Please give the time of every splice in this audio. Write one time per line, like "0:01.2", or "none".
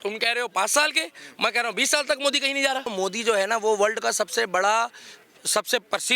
0:02.9

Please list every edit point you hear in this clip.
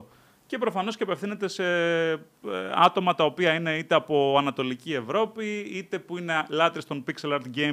none

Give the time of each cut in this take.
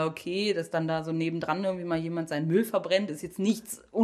none

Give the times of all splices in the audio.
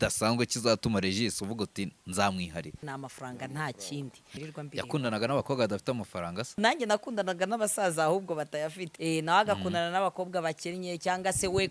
0:02.8
0:04.4
0:06.6
0:08.9

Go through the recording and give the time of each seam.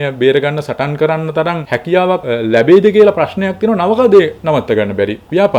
0:02.0

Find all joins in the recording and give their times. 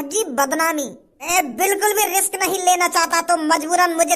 0:01.3

